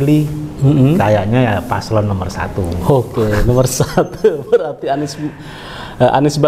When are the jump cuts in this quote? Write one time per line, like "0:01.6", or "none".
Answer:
none